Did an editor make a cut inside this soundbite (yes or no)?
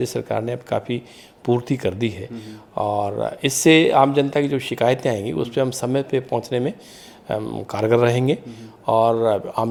no